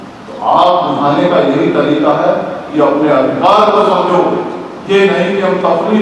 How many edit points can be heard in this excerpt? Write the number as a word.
zero